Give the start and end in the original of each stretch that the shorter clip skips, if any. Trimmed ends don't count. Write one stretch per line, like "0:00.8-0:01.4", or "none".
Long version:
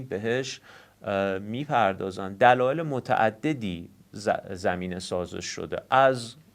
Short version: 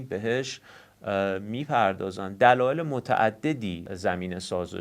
0:03.9-0:04.5